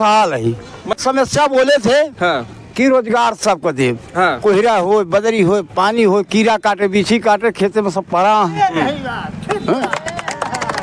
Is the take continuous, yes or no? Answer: no